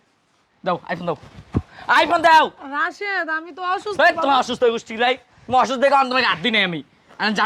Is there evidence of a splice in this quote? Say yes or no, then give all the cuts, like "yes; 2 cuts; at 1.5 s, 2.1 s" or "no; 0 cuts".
no; 0 cuts